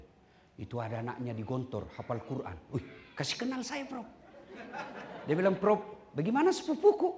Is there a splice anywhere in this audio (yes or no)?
no